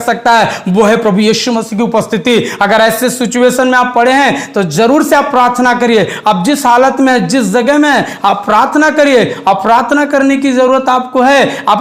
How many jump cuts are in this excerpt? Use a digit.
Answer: 0